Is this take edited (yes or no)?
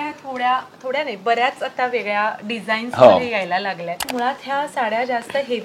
yes